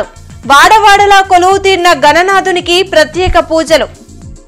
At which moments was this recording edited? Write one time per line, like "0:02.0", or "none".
none